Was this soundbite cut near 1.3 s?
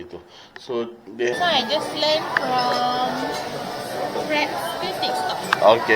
yes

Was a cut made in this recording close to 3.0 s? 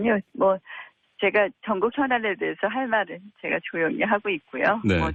no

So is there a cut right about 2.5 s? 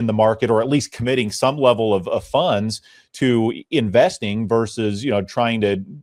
no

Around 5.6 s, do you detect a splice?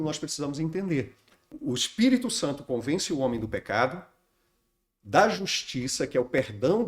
no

